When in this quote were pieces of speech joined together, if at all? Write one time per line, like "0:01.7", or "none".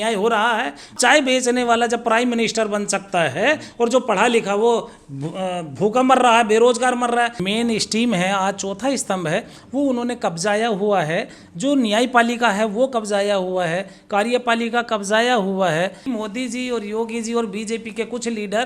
0:00.9
0:07.4
0:16.0